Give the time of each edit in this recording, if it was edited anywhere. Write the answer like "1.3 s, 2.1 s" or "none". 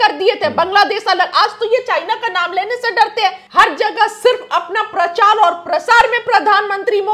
3.4 s